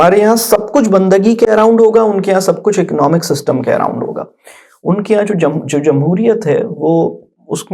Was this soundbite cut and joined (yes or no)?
no